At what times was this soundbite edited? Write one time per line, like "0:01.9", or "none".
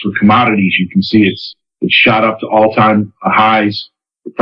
none